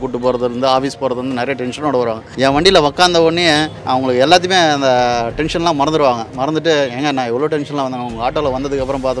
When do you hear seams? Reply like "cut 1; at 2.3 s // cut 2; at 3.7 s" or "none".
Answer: cut 1; at 2.3 s // cut 2; at 3.7 s